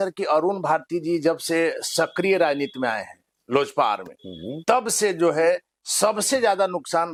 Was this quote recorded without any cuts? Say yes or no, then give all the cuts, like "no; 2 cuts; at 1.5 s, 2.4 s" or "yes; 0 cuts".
yes; 0 cuts